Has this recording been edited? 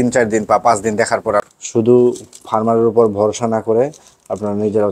yes; 1 cut; at 1.4 s

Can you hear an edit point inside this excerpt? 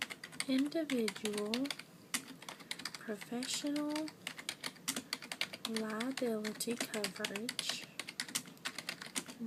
no; 0 cuts

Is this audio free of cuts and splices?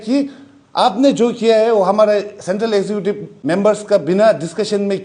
no; 1 cut; at 3.3 s

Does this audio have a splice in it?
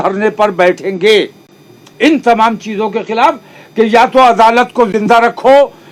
no; 0 cuts

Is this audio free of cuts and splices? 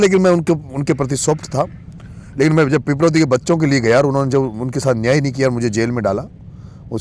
yes; 0 cuts

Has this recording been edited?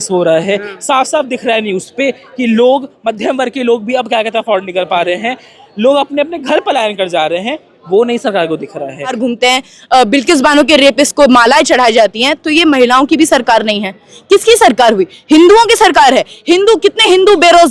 yes; 1 cut; at 9.1 s

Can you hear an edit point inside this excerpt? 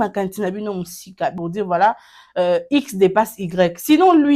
yes; 1 cut; at 1.3 s

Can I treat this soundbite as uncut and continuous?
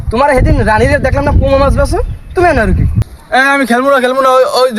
no; 1 cut; at 2.8 s

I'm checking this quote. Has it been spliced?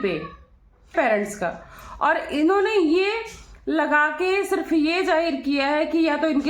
yes; 1 cut; at 0.9 s

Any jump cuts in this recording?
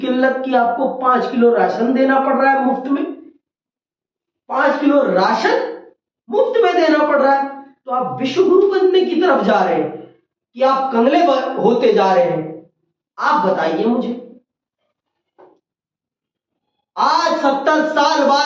no; 0 cuts

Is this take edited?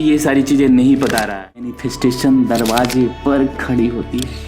yes; 1 cut; at 1.8 s

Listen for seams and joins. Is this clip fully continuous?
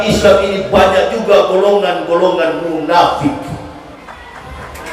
no; 1 cut; at 4.0 s

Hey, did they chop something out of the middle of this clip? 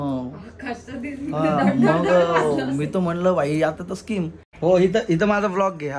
yes; 1 cut; at 4.4 s

